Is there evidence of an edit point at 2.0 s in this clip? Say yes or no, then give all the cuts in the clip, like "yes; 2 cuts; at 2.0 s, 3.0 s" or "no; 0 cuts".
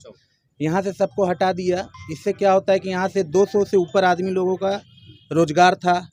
no; 0 cuts